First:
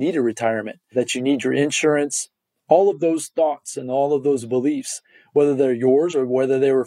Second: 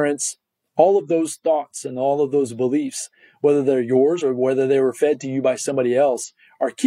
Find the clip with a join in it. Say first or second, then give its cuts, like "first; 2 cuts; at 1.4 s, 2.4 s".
first; 1 cut; at 0.9 s